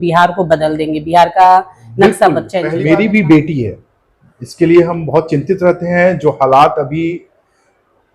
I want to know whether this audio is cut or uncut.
cut